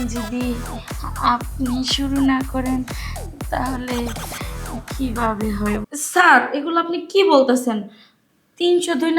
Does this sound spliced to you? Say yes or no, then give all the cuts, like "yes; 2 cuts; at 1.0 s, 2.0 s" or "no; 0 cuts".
yes; 1 cut; at 6.0 s